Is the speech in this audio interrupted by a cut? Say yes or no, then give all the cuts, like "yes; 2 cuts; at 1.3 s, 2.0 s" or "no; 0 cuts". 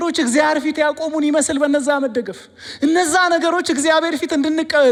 no; 0 cuts